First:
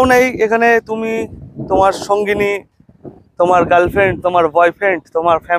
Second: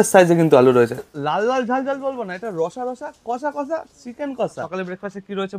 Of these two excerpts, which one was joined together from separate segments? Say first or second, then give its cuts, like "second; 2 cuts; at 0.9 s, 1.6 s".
second; 2 cuts; at 1.0 s, 4.7 s